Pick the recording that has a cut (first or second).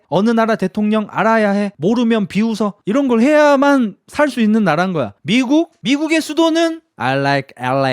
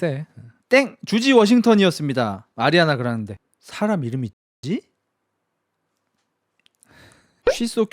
first